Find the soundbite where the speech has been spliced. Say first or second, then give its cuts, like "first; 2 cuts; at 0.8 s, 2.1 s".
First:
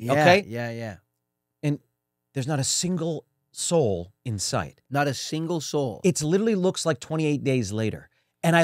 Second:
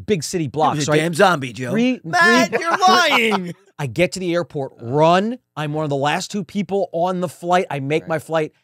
second; 1 cut; at 3.4 s